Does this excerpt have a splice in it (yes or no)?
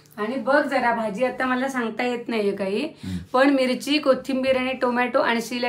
no